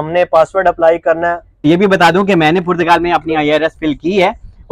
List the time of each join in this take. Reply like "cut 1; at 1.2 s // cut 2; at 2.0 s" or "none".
cut 1; at 1.5 s